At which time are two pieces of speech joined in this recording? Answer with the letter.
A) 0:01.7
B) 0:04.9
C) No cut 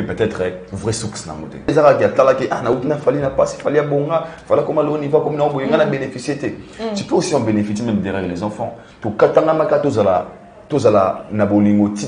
A